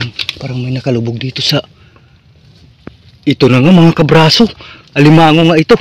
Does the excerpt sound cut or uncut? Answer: uncut